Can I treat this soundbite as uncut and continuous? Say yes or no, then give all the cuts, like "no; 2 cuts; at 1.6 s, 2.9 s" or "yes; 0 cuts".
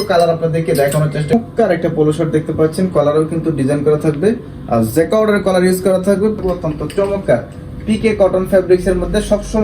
no; 2 cuts; at 1.3 s, 6.4 s